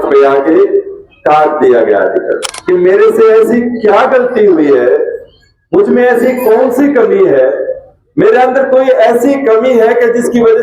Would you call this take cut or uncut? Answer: cut